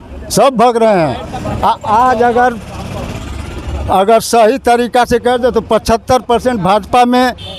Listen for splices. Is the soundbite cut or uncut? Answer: uncut